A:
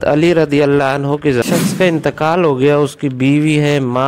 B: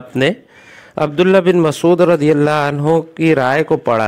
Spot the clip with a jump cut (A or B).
A